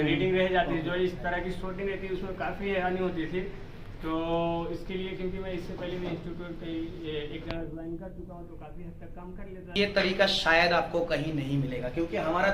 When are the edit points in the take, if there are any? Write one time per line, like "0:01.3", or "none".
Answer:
0:09.7